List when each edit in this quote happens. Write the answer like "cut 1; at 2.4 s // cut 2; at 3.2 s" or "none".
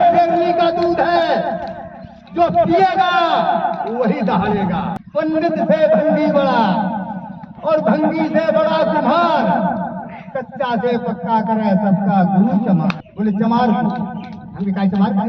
cut 1; at 5.0 s // cut 2; at 13.1 s